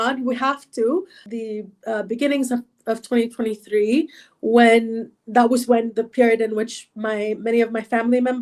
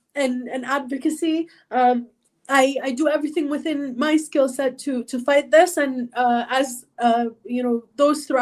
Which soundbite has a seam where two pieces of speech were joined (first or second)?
first